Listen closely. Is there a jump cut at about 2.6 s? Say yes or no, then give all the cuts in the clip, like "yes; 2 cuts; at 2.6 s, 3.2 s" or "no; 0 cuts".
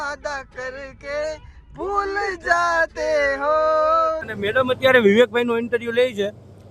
no; 1 cut; at 4.3 s